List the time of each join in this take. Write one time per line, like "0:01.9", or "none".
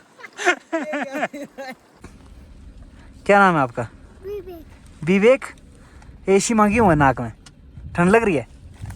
0:01.9